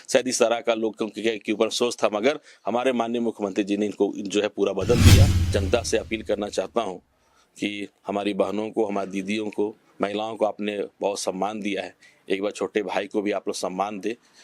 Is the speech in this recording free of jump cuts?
no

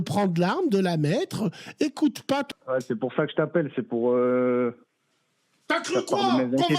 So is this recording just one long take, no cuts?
no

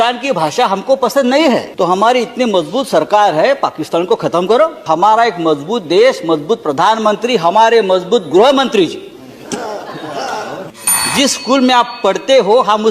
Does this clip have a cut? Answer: yes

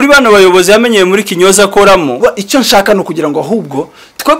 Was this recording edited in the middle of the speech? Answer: yes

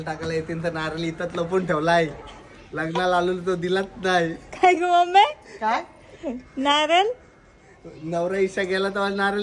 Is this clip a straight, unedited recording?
yes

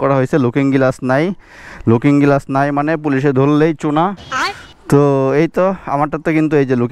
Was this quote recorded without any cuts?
yes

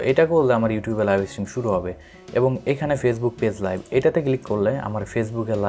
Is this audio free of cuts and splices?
yes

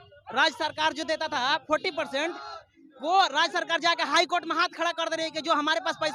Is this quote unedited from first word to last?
yes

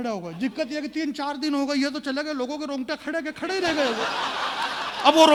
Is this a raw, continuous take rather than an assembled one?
yes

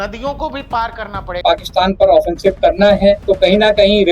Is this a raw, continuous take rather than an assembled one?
no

